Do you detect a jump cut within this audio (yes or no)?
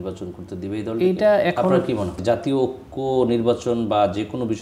yes